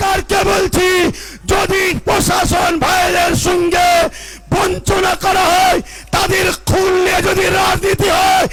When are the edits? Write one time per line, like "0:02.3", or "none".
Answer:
none